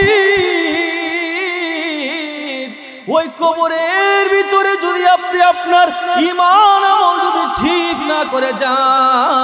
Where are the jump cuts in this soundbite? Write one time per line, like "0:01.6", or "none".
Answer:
none